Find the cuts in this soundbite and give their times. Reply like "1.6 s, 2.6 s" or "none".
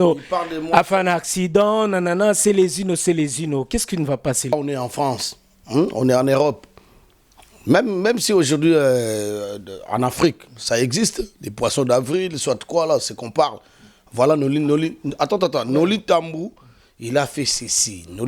4.5 s